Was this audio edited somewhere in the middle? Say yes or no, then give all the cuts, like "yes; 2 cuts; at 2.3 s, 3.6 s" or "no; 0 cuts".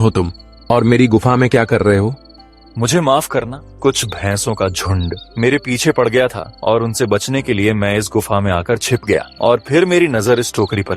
yes; 4 cuts; at 3.6 s, 5.2 s, 6.5 s, 9.3 s